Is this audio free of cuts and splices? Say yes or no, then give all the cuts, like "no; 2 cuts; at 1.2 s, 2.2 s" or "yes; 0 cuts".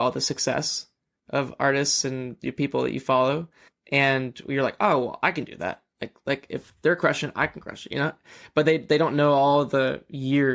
yes; 0 cuts